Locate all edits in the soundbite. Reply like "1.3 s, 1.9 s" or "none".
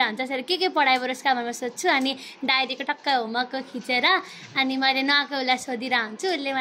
none

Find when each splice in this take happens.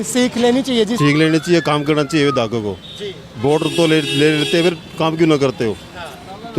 0.9 s

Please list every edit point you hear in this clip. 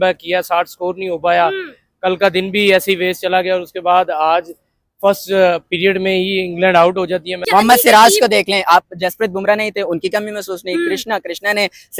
7.4 s

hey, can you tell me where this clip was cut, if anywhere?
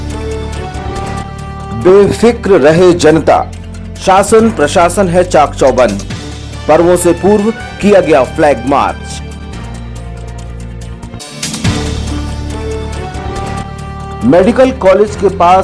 none

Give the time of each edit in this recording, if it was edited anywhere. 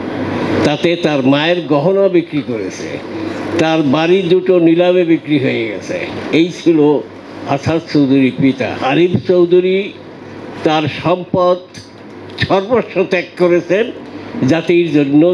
8.7 s

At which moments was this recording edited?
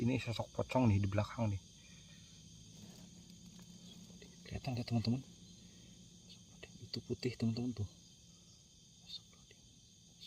2.8 s

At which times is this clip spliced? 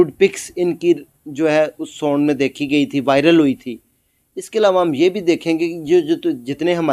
none

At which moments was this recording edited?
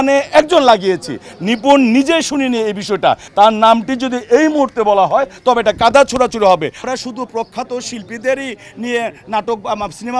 3.2 s, 6.8 s

